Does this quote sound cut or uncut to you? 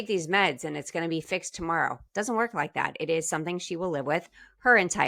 uncut